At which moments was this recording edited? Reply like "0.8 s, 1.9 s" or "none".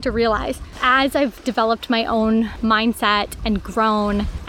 none